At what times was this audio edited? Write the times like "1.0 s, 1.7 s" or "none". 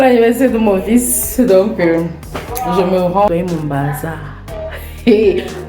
3.3 s